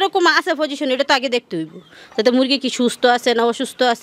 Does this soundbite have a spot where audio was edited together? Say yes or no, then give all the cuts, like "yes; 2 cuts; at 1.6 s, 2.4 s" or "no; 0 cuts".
no; 0 cuts